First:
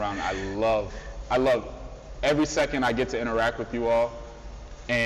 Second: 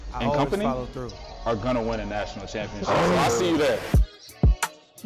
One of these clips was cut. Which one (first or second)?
second